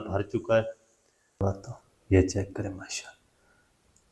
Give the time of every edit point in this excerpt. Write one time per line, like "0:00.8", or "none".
0:01.4